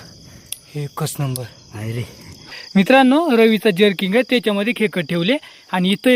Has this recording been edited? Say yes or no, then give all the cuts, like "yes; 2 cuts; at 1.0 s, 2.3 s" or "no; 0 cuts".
yes; 1 cut; at 2.3 s